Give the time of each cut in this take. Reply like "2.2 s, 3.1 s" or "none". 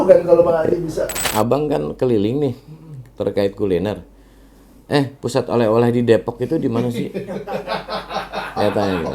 1.3 s